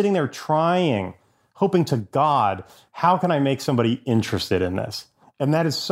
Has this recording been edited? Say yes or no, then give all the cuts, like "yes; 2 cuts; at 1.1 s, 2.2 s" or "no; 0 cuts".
no; 0 cuts